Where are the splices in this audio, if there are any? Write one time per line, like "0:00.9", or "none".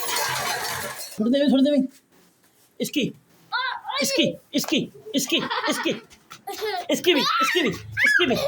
0:01.0